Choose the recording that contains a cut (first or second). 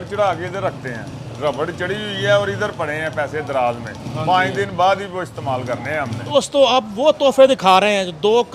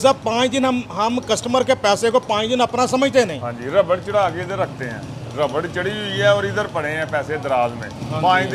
first